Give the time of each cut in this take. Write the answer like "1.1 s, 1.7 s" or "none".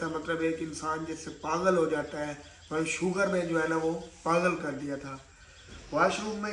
none